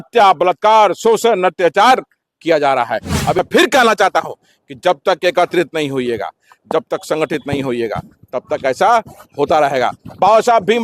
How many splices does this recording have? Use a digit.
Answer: 1